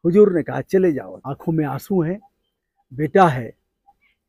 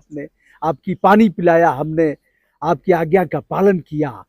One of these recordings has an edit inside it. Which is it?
first; 1 cut; at 1.2 s

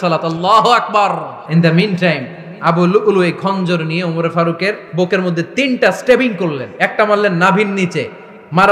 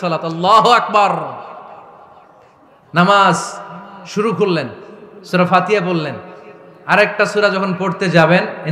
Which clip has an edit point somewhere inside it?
first; 2 cuts; at 1.4 s, 4.8 s

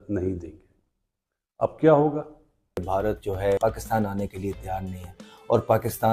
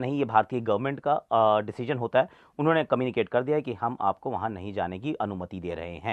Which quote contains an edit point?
first; 1 cut; at 2.8 s

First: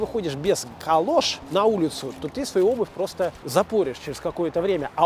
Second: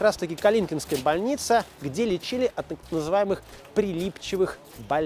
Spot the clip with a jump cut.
first; 2 cuts; at 1.4 s, 3.4 s

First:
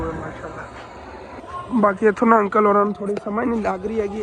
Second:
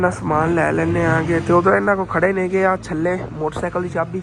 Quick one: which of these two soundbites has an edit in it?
first; 1 cut; at 1.4 s

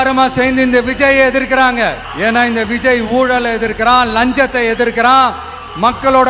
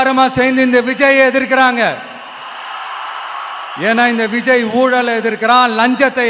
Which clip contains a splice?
first; 1 cut; at 2.1 s

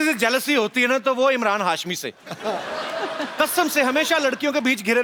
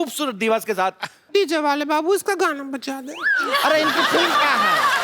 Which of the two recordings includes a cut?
second; 1 cut; at 1.2 s

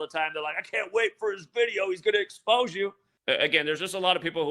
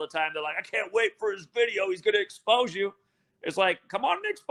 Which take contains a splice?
first; 1 cut; at 3.1 s

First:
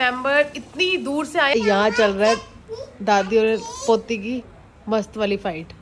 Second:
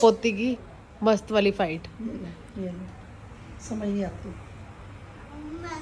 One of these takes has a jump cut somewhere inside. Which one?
first; 1 cut; at 1.5 s

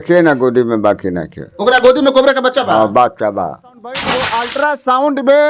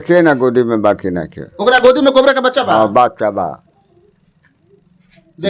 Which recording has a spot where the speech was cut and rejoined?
first; 1 cut; at 4.1 s

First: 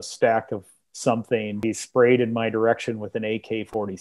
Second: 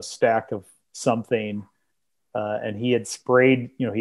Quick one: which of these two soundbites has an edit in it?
first; 1 cut; at 1.6 s

